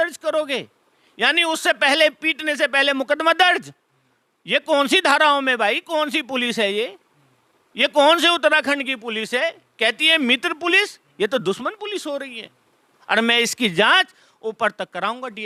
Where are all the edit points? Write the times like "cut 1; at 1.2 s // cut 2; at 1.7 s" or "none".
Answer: none